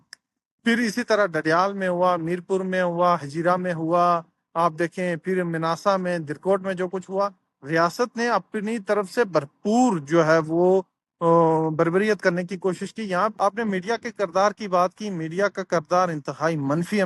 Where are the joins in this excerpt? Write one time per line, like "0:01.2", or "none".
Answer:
0:13.3